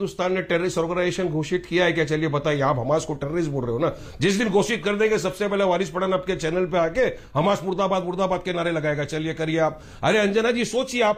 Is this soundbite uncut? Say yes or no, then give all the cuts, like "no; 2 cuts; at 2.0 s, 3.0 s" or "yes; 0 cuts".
yes; 0 cuts